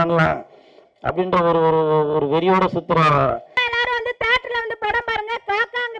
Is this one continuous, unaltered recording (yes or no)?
no